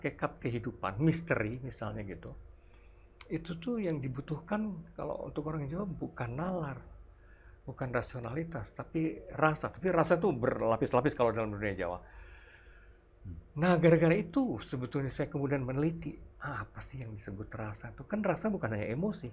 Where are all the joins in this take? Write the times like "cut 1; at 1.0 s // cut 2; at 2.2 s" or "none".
none